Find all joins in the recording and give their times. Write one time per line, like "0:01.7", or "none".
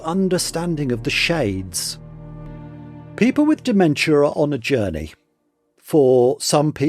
0:02.2